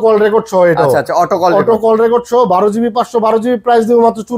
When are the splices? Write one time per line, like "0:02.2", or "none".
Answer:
none